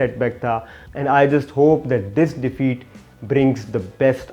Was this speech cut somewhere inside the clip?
yes; 1 cut; at 1.0 s

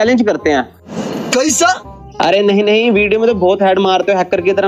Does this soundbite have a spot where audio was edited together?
yes; 1 cut; at 2.0 s

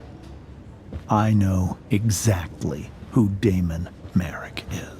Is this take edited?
yes; 1 cut; at 1.0 s

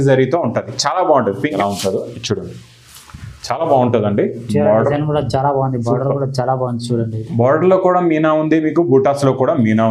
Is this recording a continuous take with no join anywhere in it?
no; 1 cut; at 1.5 s

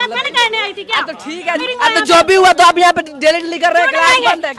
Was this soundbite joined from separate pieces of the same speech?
yes; 1 cut; at 1.7 s

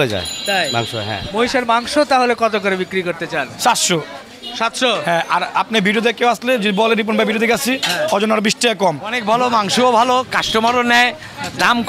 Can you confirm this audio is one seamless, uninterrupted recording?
no; 2 cuts; at 1.2 s, 9.2 s

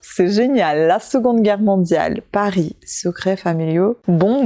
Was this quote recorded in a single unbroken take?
yes; 0 cuts

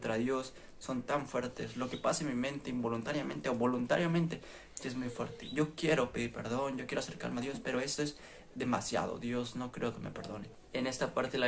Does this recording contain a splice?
yes; 1 cut; at 10.5 s

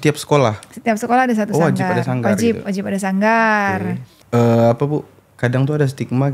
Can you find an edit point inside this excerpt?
yes; 1 cut; at 4.1 s

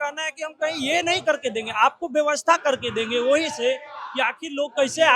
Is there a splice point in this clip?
no; 0 cuts

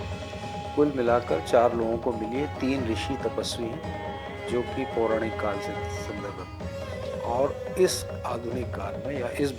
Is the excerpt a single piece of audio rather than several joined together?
yes; 0 cuts

